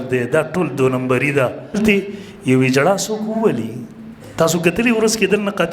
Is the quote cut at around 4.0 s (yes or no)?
no